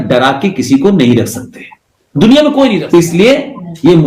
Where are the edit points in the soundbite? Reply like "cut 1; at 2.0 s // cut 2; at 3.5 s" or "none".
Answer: cut 1; at 2.8 s

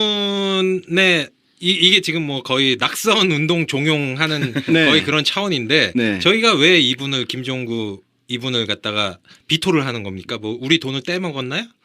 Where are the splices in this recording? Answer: none

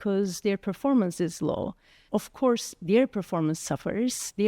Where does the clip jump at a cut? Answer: cut 1; at 2.0 s

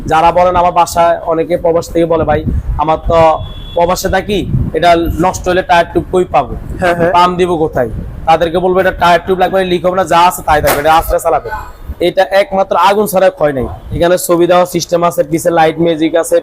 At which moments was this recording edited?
cut 1; at 13.9 s

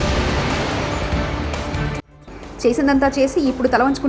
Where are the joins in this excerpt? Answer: cut 1; at 2.1 s

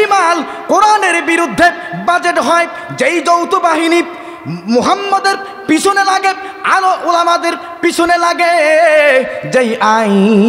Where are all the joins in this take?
none

